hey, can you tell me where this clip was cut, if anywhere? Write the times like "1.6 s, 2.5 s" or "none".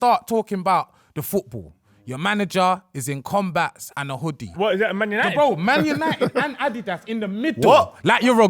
4.5 s